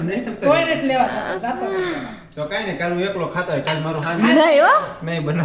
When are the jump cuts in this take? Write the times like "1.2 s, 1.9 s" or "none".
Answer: none

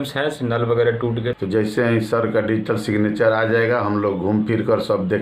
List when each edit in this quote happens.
1.3 s

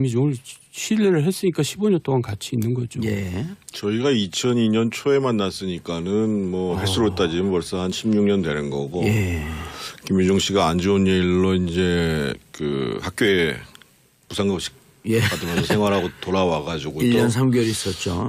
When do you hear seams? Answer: 10.3 s

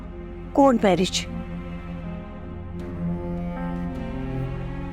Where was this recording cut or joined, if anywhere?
none

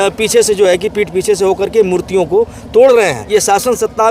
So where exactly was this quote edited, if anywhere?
3.2 s

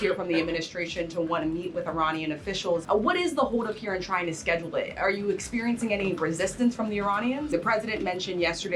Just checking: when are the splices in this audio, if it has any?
2.8 s, 7.5 s

